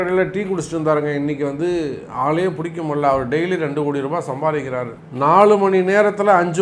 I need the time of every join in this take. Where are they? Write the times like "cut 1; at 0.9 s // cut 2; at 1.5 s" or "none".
cut 1; at 5.0 s